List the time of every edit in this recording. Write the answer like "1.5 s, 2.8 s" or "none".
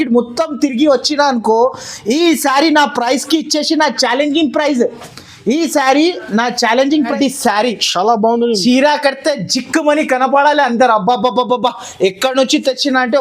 7.1 s